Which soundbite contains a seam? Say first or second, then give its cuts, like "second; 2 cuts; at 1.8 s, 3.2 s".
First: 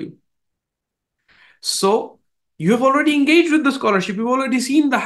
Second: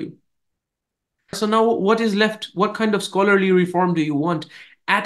second; 1 cut; at 1.4 s